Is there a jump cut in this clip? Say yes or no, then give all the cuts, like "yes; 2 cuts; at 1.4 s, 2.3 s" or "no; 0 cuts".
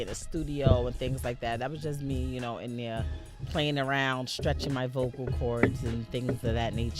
yes; 1 cut; at 2.4 s